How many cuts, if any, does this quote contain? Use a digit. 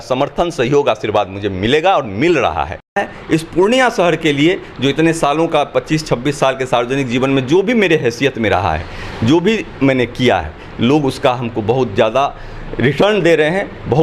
1